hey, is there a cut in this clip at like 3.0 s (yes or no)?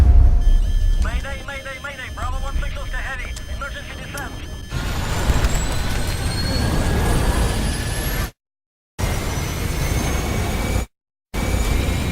no